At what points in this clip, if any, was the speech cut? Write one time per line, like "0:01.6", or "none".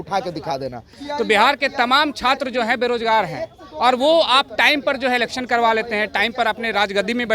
0:00.9